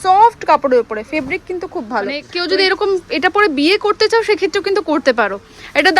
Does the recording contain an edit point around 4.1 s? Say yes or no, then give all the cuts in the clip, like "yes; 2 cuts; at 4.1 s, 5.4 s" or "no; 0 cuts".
no; 1 cut; at 2.3 s